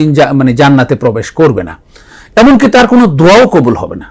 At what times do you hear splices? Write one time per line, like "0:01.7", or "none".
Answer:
none